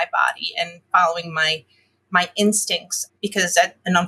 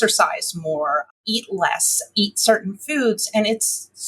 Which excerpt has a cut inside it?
second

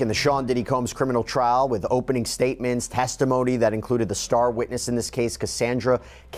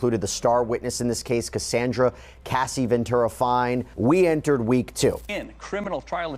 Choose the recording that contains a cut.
second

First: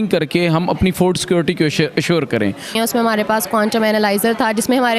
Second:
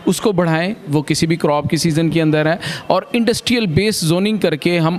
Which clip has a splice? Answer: first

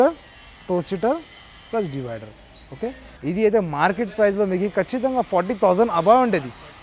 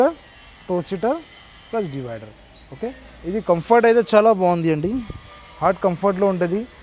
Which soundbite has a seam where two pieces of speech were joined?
first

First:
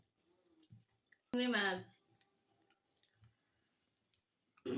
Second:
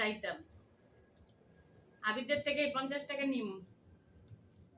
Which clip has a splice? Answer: first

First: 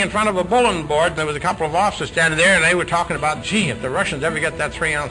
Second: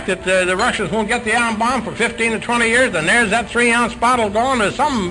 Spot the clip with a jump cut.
first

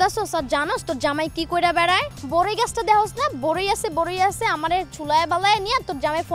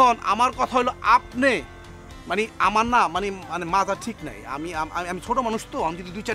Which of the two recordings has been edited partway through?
first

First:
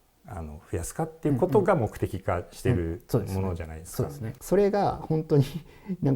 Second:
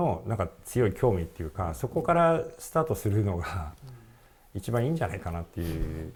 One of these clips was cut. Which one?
first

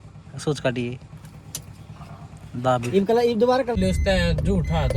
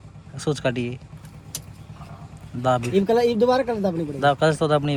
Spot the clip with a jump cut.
first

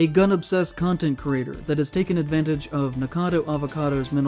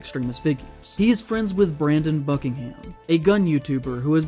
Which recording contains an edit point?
second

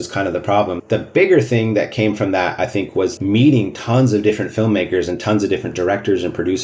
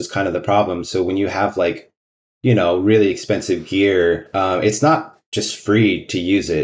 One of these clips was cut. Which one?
first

